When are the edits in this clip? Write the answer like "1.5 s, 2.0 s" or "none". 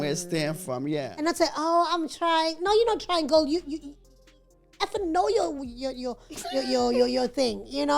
1.1 s